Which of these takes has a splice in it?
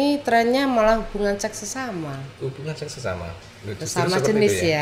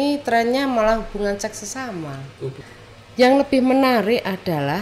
second; 1 cut; at 2.6 s

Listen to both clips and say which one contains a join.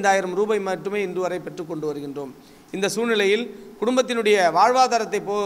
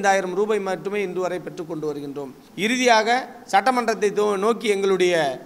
second; 1 cut; at 2.4 s

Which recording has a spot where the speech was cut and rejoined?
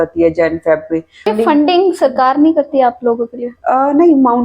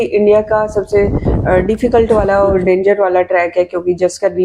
first; 1 cut; at 1.3 s

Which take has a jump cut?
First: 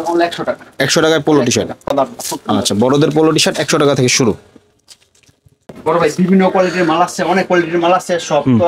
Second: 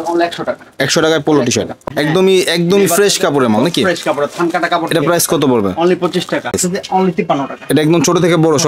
second; 2 cuts; at 1.8 s, 6.5 s

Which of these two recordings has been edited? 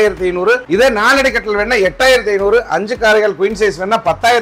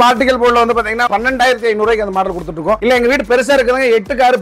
second; 1 cut; at 1.1 s

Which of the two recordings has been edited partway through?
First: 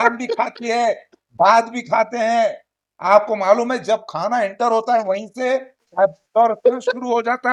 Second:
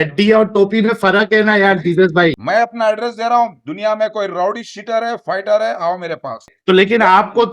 second; 2 cuts; at 2.4 s, 6.5 s

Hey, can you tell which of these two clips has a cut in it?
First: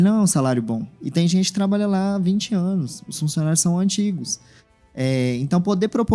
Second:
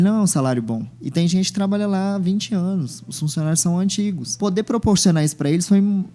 second; 1 cut; at 4.4 s

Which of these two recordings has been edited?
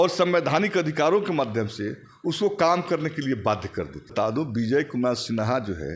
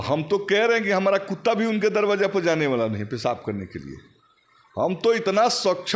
first; 1 cut; at 4.1 s

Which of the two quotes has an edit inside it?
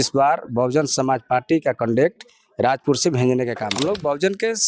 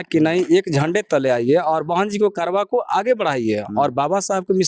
first; 1 cut; at 3.7 s

